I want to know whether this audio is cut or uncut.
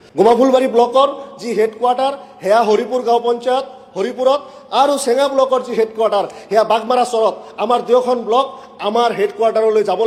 uncut